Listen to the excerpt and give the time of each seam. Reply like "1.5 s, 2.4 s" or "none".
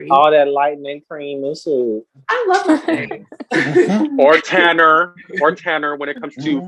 none